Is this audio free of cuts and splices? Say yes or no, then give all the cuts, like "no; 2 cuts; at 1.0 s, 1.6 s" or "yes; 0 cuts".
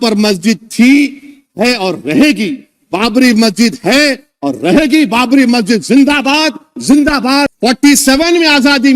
no; 1 cut; at 7.5 s